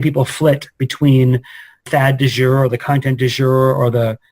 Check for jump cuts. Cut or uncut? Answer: cut